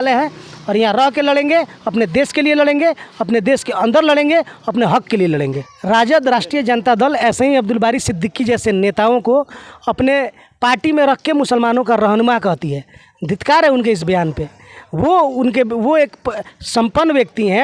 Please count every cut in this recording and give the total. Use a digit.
1